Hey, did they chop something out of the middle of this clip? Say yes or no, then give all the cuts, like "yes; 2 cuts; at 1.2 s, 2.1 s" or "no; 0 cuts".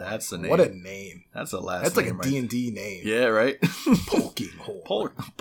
no; 0 cuts